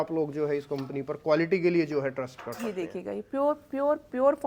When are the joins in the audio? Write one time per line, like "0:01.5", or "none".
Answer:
none